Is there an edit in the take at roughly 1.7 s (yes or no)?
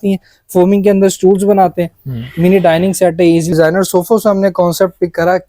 no